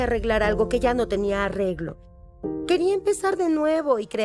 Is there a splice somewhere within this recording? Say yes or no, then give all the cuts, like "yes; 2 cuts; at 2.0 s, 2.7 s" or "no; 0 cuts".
no; 0 cuts